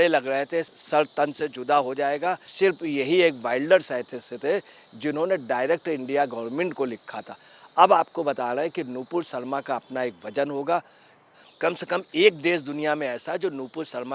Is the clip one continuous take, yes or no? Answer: no